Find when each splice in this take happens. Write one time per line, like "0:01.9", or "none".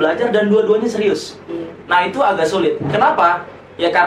none